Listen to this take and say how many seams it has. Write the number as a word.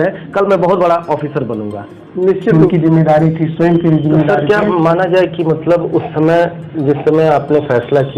one